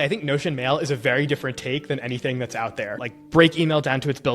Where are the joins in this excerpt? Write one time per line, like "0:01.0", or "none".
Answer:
0:02.9